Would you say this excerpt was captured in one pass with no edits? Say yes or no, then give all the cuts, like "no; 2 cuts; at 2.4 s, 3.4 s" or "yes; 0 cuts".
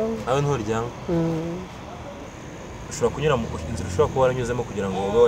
no; 1 cut; at 2.2 s